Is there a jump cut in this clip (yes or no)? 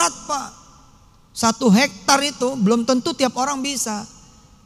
no